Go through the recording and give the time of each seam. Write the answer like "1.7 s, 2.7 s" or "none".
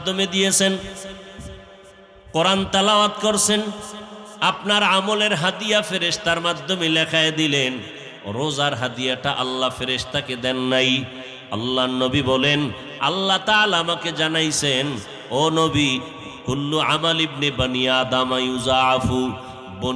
16.2 s